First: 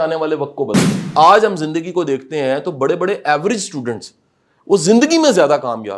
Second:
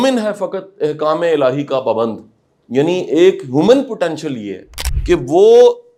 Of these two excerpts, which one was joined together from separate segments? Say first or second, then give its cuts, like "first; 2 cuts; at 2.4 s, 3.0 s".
first; 1 cut; at 0.9 s